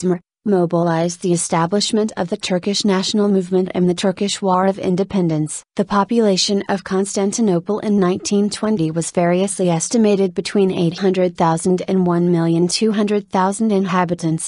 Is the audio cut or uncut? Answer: cut